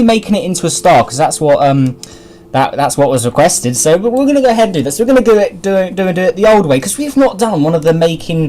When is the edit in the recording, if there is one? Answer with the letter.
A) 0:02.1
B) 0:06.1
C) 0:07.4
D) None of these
B